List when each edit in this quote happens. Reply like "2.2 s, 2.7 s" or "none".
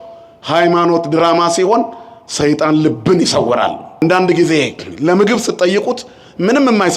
4.0 s